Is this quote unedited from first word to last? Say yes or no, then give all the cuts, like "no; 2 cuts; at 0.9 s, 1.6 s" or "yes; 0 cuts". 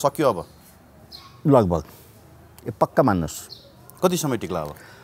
yes; 0 cuts